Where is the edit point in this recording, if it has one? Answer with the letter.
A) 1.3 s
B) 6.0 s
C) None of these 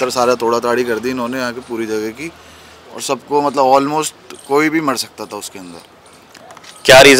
C